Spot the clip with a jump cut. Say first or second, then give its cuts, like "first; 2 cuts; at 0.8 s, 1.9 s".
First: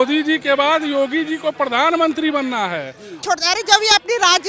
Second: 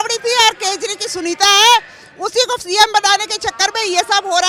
first; 1 cut; at 3.2 s